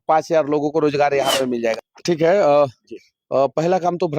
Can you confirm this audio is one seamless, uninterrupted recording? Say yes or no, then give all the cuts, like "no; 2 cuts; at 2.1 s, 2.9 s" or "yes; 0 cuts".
no; 1 cut; at 1.9 s